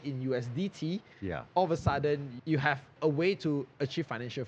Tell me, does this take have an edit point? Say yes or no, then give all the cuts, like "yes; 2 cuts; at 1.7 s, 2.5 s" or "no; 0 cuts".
yes; 1 cut; at 2.7 s